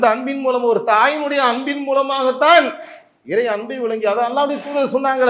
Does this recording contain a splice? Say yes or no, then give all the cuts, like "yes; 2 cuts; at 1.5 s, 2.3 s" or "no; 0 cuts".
no; 0 cuts